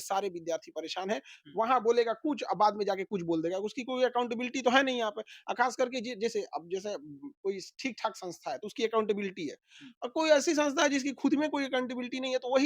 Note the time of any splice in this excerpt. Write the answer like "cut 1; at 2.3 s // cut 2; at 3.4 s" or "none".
none